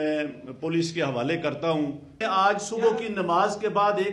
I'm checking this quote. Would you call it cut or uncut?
cut